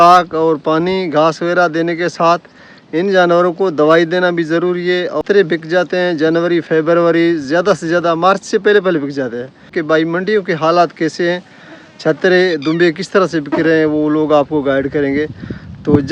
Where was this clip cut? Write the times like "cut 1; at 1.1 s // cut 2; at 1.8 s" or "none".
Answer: cut 1; at 5.2 s // cut 2; at 9.8 s